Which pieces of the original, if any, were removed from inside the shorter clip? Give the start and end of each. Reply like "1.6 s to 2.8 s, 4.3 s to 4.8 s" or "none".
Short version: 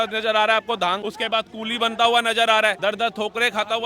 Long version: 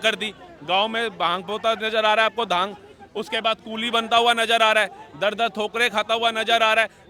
2.7 s to 3.2 s, 4.9 s to 5.2 s

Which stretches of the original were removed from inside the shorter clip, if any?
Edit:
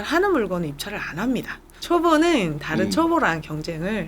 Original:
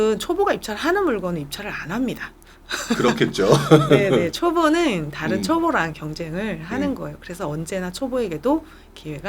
2.5 s to 4.3 s

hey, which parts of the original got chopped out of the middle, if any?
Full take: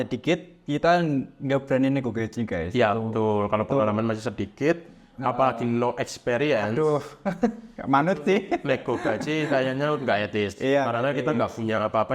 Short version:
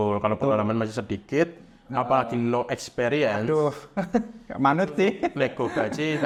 none

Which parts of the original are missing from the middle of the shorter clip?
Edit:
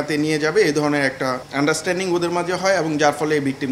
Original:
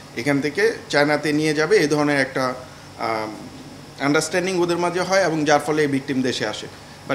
2.6 s to 3.9 s

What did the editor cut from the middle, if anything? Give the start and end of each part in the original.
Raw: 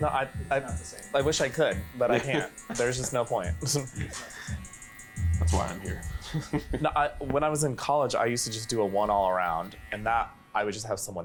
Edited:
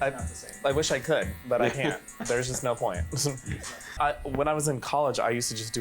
4.5 s to 6.9 s

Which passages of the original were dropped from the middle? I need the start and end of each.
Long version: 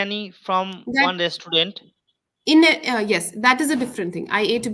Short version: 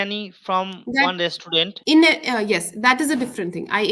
1.8 s to 2.3 s

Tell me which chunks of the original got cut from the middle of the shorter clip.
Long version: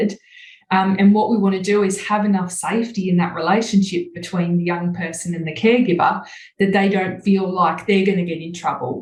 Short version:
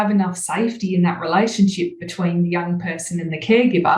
none

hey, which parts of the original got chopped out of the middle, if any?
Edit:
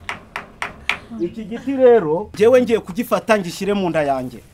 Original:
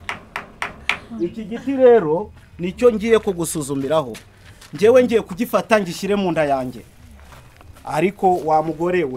2.3 s to 4.7 s

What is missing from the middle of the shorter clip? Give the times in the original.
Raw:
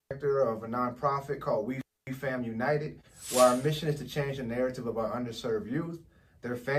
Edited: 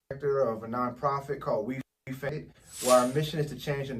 2.3 s to 2.8 s

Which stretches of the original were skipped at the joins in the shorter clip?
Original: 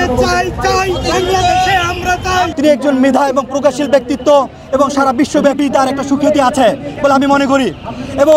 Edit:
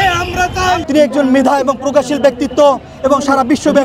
none

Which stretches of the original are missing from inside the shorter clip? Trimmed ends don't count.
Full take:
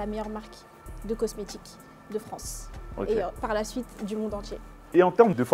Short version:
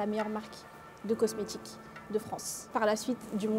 2.7 s to 3.4 s

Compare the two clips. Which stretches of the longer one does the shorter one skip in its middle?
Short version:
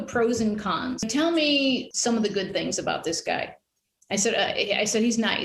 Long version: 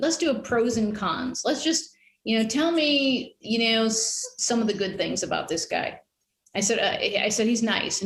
1.4 s to 2.5 s, 3.3 s to 4.4 s

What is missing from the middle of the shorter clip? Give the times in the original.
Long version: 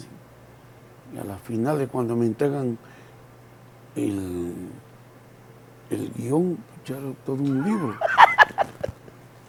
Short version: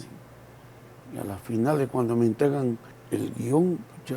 2.9 s to 5.7 s

